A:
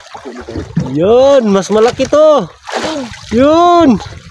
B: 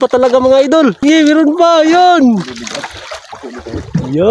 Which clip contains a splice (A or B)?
B